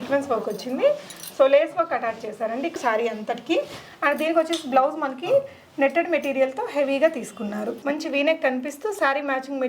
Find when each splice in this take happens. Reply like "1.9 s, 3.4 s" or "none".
2.7 s, 7.8 s